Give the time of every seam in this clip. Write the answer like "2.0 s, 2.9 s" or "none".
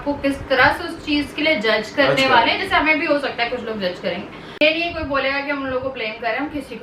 4.6 s